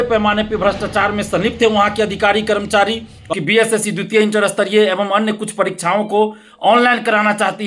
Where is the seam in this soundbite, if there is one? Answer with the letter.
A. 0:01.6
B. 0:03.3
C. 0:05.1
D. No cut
B